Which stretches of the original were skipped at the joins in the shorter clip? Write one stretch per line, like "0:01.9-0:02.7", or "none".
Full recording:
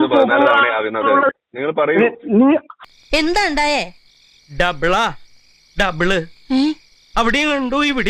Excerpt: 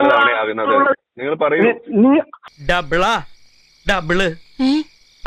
0:02.8-0:04.4